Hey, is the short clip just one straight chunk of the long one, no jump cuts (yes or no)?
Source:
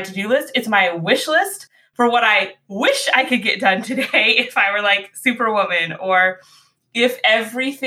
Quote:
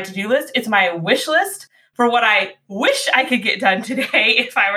yes